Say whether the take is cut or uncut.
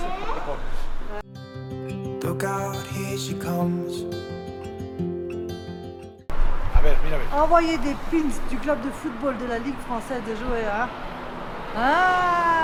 uncut